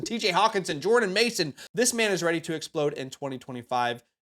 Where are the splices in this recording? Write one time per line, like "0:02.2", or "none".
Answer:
0:01.6

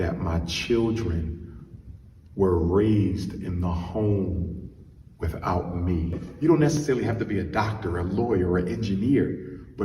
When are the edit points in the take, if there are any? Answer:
0:06.3

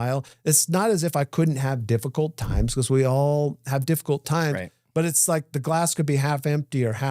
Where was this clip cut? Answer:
none

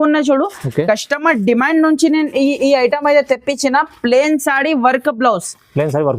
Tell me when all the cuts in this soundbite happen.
none

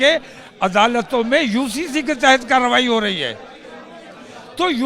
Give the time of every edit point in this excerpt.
none

